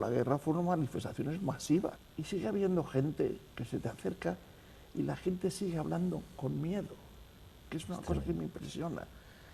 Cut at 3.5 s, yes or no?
no